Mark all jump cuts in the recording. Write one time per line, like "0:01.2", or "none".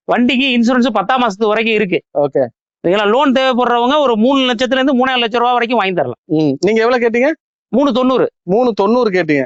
none